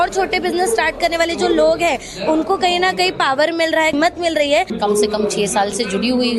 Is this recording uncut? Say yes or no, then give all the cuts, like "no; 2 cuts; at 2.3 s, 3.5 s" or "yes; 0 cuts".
no; 2 cuts; at 3.9 s, 4.7 s